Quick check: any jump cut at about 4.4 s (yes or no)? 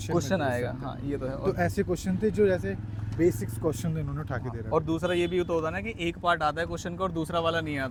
no